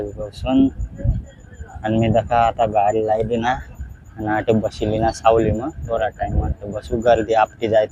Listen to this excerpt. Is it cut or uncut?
uncut